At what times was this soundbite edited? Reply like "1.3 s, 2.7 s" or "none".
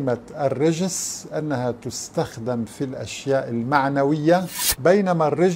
4.6 s